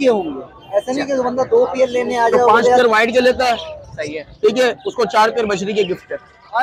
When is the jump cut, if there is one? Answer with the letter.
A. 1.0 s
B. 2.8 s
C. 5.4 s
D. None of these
B